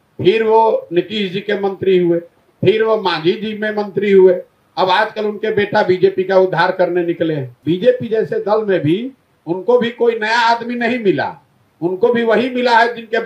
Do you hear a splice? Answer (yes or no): yes